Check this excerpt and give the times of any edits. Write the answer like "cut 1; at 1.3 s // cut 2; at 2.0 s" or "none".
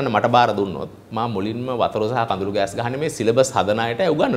none